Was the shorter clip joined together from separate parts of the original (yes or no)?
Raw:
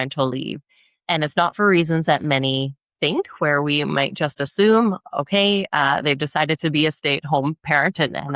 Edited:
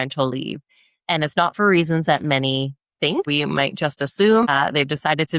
yes